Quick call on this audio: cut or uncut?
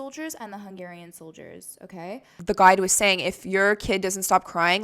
cut